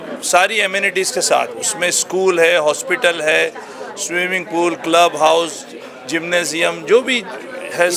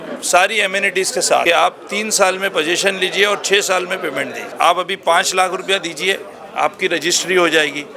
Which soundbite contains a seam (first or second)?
second